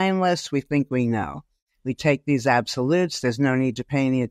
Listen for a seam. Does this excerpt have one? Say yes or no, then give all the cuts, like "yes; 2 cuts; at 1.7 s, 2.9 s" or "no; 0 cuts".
no; 0 cuts